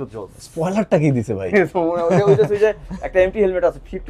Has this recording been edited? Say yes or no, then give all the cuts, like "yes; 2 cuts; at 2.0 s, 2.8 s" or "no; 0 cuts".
no; 0 cuts